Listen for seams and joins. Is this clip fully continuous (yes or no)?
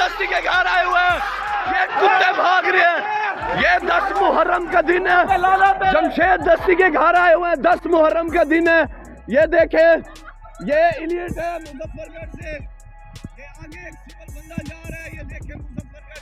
yes